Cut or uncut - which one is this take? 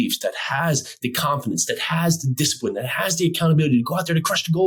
uncut